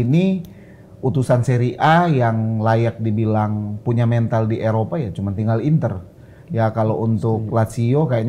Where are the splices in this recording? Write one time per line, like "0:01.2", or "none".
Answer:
none